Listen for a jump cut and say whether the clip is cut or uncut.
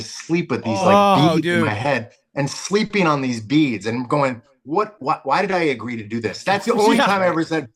uncut